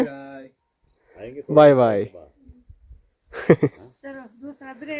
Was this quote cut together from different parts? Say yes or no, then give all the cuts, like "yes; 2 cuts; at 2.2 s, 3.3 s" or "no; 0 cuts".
no; 0 cuts